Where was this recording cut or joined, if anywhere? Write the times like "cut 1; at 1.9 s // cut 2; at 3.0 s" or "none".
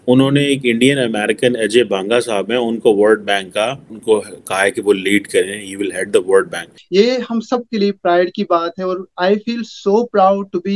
cut 1; at 3.9 s // cut 2; at 6.8 s